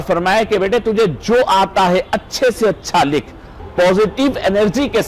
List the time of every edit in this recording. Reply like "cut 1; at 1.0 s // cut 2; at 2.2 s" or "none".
cut 1; at 3.6 s